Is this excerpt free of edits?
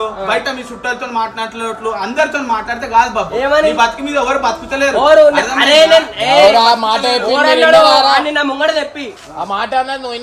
yes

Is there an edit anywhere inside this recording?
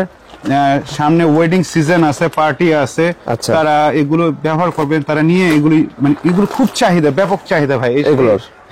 no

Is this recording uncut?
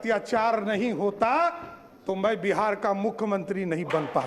yes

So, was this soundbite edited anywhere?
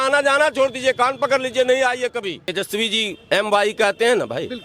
yes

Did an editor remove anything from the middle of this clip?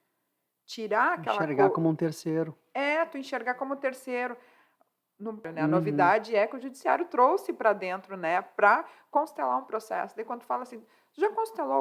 yes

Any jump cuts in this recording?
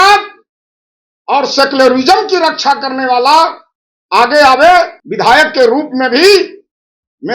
yes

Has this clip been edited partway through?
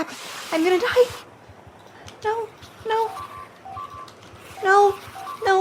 no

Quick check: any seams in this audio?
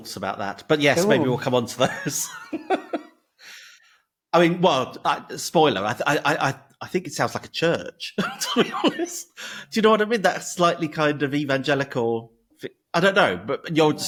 no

